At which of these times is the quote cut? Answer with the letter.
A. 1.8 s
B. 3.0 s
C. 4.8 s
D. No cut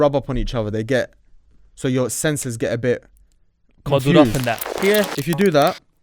C